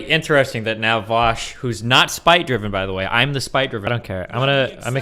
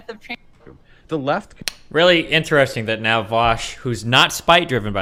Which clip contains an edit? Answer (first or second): first